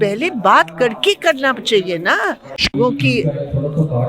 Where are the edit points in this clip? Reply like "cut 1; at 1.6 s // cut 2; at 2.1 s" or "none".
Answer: cut 1; at 2.8 s